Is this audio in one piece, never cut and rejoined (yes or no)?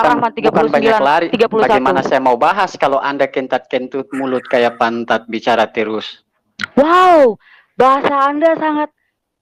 yes